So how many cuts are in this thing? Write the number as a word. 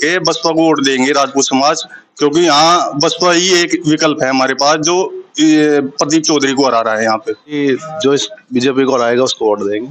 one